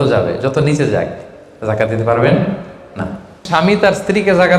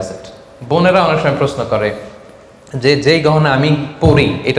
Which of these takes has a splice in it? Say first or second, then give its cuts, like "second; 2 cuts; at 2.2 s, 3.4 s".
first; 1 cut; at 3.5 s